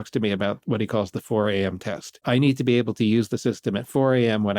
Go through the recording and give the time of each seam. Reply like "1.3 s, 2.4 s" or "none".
2.2 s